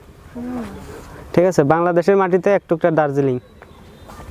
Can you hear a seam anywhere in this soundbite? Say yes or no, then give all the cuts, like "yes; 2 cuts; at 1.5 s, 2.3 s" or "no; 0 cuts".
no; 0 cuts